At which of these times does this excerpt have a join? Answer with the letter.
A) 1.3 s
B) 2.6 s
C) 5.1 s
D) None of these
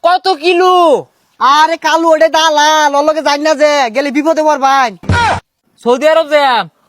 C